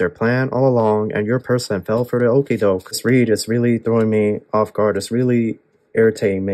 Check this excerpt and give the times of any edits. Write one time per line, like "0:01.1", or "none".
0:02.9